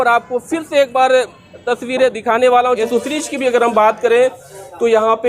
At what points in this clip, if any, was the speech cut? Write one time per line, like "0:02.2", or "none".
0:02.8